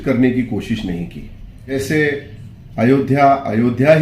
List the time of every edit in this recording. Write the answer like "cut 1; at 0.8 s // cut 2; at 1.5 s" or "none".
cut 1; at 1.7 s